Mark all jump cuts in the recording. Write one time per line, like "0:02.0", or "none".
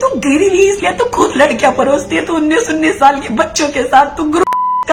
none